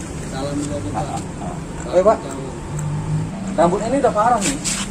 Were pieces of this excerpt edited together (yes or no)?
yes